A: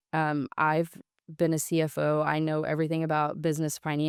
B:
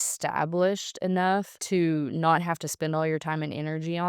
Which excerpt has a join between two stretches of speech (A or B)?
B